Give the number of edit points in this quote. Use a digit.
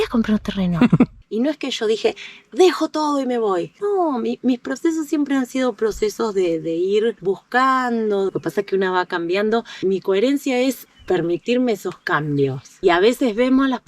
3